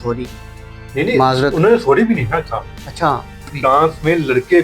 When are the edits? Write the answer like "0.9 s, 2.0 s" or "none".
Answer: 3.5 s